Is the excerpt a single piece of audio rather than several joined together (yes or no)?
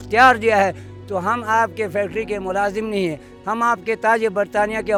yes